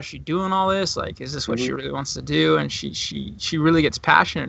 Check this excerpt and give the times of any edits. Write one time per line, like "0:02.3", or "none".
0:02.7